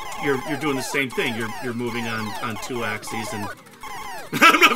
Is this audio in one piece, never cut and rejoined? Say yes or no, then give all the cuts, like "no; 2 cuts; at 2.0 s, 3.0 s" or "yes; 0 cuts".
yes; 0 cuts